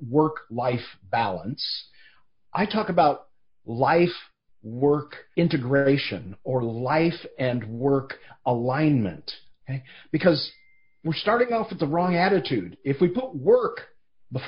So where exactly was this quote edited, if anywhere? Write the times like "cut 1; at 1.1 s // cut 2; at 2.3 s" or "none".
cut 1; at 5.2 s